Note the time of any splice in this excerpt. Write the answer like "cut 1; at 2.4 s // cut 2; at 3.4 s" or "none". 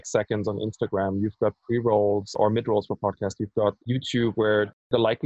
cut 1; at 2.4 s // cut 2; at 3.8 s